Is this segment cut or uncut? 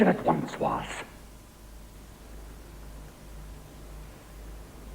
cut